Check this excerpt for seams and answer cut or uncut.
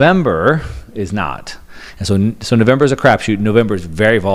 uncut